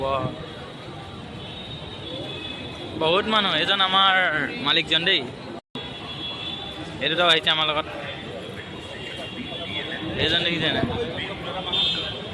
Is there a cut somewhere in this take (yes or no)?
yes